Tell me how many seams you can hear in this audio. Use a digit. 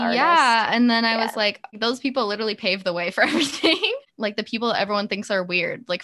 2